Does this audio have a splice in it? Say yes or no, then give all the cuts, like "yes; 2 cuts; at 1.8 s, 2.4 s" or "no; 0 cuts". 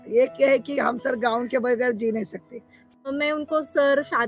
yes; 1 cut; at 3.1 s